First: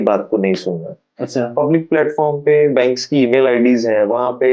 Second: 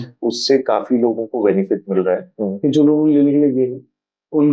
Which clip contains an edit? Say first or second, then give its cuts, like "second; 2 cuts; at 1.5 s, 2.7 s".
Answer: second; 1 cut; at 2.3 s